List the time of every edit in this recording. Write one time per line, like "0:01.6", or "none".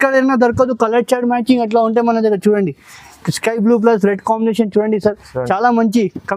none

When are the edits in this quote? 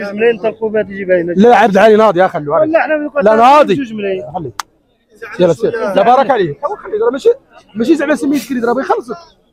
none

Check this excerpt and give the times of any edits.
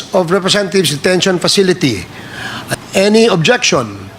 0:02.6

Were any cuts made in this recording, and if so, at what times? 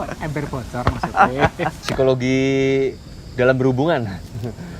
0:01.8

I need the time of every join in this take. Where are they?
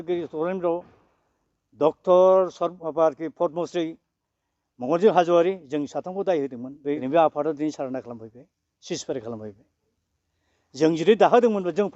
0:07.0

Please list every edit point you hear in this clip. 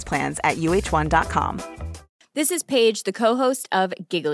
0:02.0

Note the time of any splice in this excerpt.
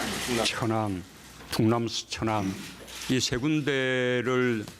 0:02.3

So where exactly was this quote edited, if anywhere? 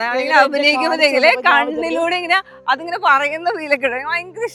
none

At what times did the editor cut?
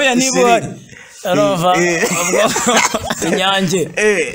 0:03.2

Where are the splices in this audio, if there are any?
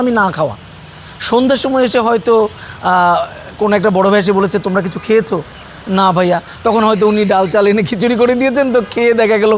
none

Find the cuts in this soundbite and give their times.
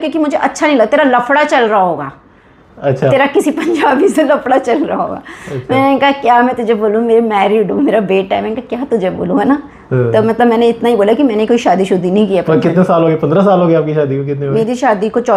none

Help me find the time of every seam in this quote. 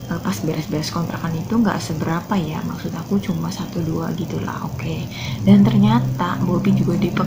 none

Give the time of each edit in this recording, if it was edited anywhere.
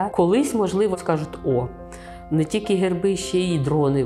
0:00.9

